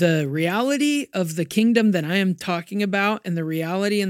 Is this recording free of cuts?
yes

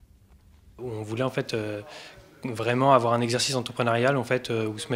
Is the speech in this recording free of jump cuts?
no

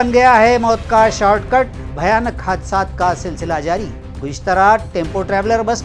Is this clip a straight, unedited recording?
yes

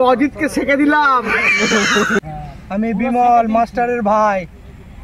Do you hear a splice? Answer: yes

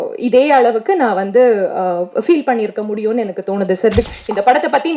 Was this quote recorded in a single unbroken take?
no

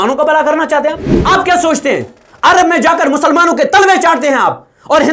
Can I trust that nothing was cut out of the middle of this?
no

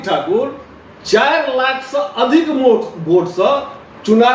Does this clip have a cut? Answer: no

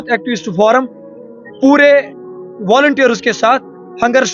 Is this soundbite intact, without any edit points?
yes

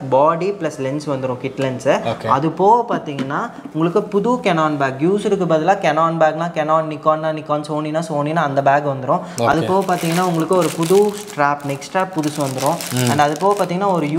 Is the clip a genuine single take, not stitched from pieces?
yes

